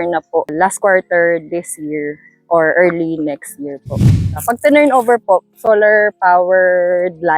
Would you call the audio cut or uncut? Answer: cut